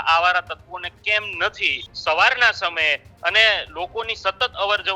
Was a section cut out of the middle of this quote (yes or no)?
yes